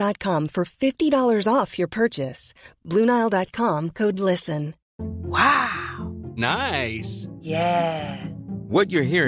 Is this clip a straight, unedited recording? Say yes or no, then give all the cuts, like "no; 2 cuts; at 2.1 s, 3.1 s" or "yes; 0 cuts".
no; 1 cut; at 4.8 s